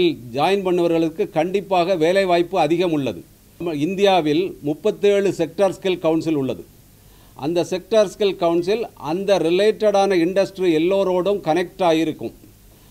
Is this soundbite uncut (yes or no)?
no